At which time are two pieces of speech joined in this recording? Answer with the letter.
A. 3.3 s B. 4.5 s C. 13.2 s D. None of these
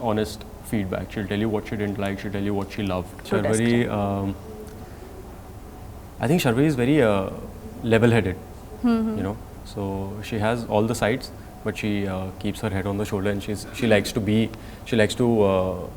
A